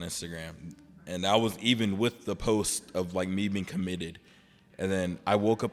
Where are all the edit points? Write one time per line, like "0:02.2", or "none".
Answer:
none